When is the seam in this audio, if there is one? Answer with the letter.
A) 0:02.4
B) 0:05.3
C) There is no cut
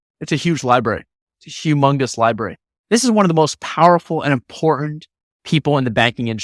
C